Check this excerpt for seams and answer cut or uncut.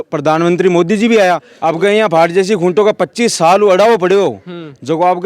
cut